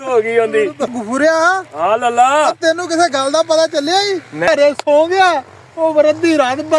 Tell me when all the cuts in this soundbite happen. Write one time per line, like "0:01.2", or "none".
0:00.9
0:04.5